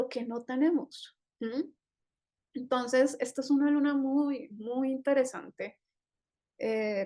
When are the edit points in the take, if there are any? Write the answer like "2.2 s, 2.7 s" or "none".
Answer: none